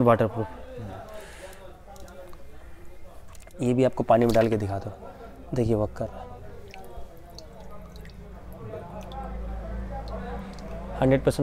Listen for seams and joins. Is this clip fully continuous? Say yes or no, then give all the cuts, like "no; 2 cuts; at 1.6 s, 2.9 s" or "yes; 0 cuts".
yes; 0 cuts